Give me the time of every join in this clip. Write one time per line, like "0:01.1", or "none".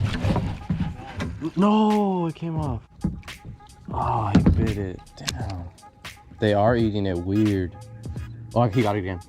0:02.9